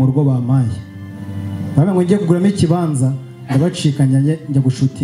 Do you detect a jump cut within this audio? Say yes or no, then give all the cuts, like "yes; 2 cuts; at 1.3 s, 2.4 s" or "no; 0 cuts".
no; 0 cuts